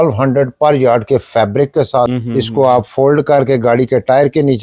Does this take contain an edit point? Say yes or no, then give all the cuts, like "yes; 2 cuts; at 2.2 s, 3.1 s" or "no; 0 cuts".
yes; 1 cut; at 2.1 s